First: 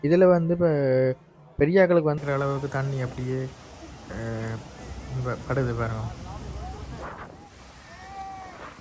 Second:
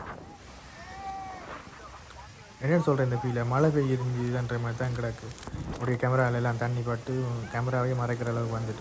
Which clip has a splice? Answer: first; 1 cut; at 2.2 s

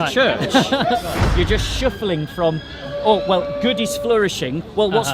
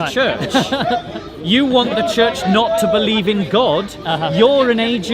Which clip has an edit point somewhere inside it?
first; 1 cut; at 1.2 s

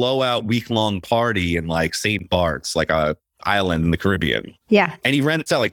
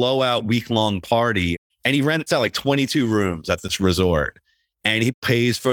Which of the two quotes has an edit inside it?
second; 2 cuts; at 1.7 s, 5.0 s

